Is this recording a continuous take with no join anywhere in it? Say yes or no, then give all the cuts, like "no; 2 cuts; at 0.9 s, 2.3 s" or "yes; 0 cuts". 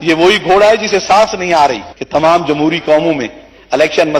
no; 1 cut; at 1.9 s